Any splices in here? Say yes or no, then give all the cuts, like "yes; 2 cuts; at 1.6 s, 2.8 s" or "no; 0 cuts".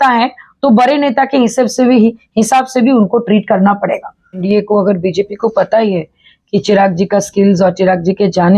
yes; 1 cut; at 4.4 s